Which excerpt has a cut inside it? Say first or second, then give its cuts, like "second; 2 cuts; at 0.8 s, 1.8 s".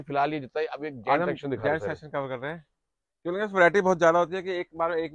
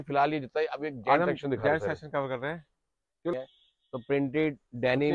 second; 1 cut; at 3.3 s